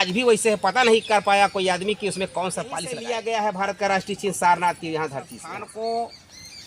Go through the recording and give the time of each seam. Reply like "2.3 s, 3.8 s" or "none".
2.9 s, 5.7 s